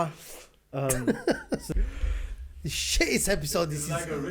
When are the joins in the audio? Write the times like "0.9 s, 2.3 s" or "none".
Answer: 1.7 s

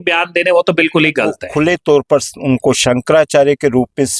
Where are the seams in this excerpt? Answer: 1.4 s

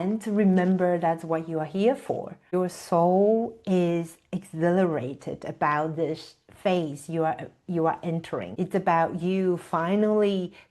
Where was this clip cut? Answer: 2.4 s, 8.5 s

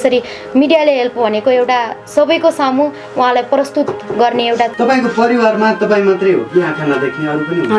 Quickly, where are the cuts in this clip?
4.7 s

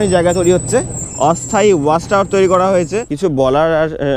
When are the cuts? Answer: 1.1 s, 3.0 s

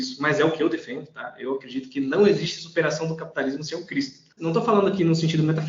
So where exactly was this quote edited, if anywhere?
4.4 s

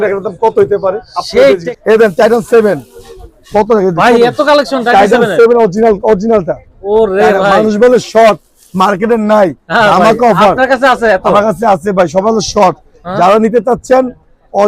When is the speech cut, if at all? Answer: 1.7 s

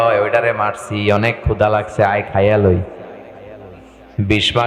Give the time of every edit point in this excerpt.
none

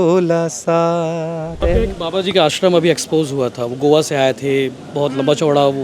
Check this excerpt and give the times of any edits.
1.6 s

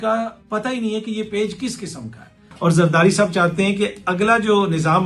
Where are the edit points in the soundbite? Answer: 2.5 s

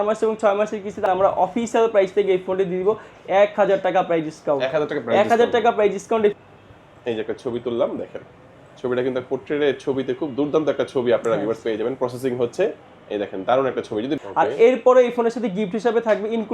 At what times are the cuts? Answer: 1.1 s, 6.3 s, 14.1 s

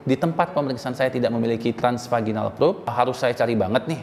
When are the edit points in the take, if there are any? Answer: 2.9 s

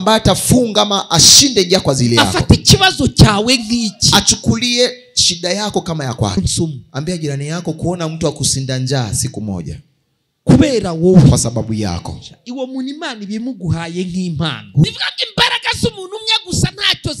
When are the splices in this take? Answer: 6.4 s, 14.8 s

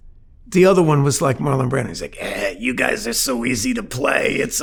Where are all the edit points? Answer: none

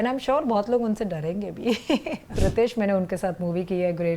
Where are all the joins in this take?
2.4 s

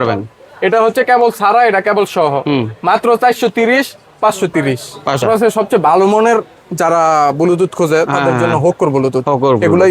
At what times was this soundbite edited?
5.2 s

